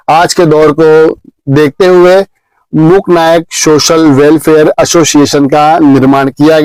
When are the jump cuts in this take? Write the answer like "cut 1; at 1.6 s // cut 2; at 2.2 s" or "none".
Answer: none